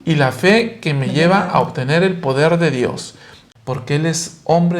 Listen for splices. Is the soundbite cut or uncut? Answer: cut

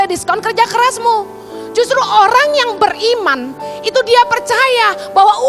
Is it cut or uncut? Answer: uncut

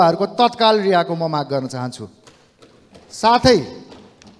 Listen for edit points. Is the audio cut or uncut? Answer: uncut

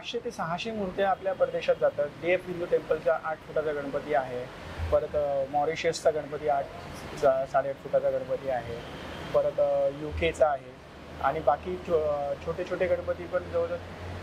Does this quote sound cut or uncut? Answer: uncut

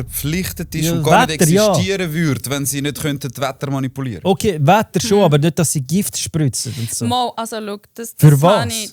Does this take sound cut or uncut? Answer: uncut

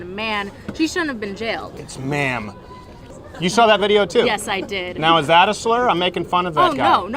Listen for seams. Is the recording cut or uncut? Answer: cut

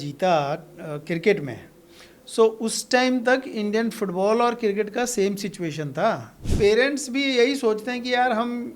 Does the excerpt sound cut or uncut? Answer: cut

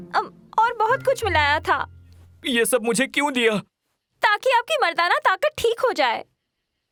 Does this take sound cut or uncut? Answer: uncut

